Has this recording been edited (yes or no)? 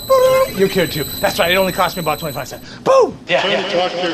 yes